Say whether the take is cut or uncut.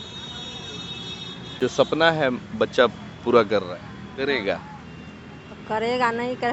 cut